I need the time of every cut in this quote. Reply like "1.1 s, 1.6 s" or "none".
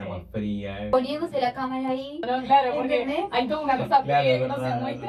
0.9 s, 2.3 s